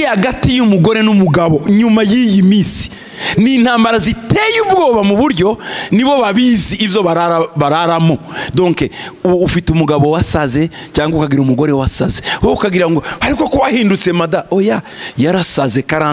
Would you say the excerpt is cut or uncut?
uncut